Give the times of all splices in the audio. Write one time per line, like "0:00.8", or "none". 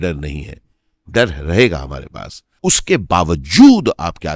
0:02.5